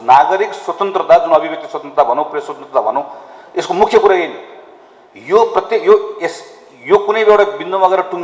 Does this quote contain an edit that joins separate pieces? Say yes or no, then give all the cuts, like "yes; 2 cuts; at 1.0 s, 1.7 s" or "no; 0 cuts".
no; 0 cuts